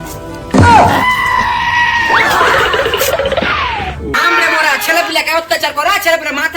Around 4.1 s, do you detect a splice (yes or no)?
yes